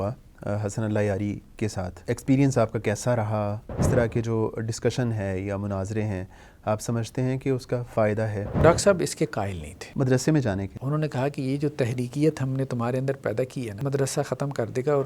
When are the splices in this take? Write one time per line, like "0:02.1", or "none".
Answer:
0:01.9
0:03.8
0:08.6
0:10.7
0:13.8